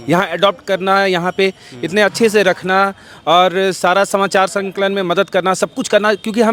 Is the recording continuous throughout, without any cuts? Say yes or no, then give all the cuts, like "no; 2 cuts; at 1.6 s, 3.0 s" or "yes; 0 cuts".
yes; 0 cuts